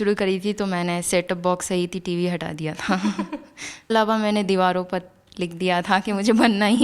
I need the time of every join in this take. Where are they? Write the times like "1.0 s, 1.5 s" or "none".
3.9 s